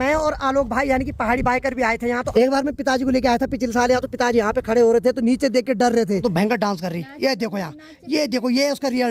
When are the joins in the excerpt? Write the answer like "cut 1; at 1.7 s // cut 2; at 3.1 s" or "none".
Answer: cut 1; at 2.3 s // cut 2; at 6.2 s